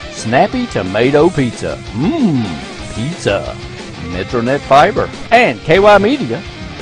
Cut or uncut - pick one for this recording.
cut